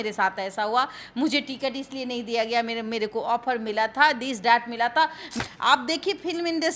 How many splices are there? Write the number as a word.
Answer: one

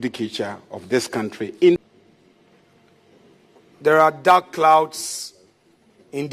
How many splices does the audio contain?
one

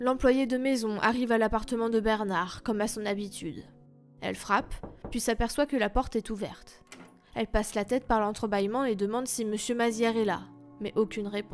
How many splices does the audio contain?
one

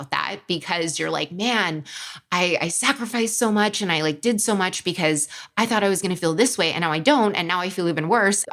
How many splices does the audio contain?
zero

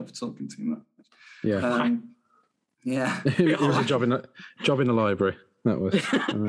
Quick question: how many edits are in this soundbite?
zero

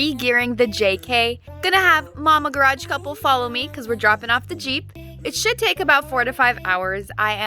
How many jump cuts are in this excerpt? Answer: one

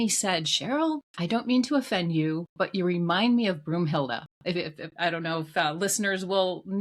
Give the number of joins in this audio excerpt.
one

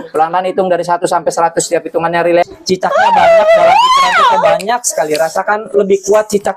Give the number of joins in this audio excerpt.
one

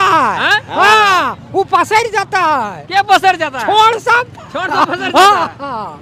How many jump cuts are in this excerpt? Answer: zero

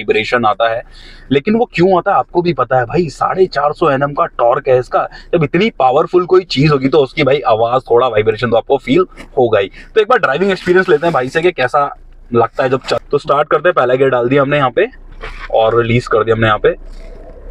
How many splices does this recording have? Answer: zero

